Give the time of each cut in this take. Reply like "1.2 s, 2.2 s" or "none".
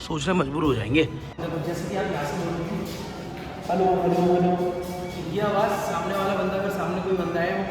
1.4 s